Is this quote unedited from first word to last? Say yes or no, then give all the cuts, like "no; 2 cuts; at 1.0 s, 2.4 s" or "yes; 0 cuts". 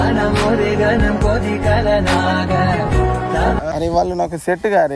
no; 1 cut; at 3.7 s